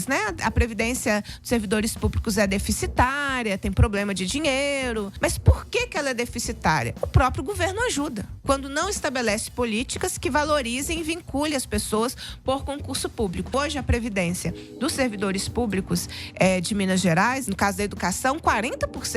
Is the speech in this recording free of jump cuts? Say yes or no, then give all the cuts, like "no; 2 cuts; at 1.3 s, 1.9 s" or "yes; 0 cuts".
no; 2 cuts; at 5.1 s, 13.5 s